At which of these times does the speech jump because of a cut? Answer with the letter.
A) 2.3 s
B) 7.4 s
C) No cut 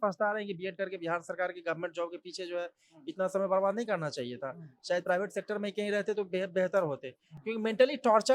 C